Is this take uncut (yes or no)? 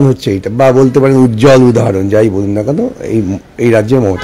yes